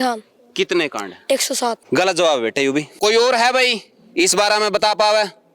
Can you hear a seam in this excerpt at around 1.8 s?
yes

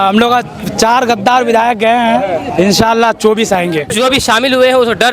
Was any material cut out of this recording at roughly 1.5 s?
no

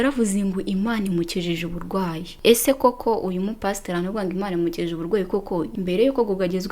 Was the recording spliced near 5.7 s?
no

